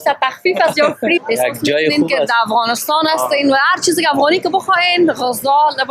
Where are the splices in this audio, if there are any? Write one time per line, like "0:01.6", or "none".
0:01.2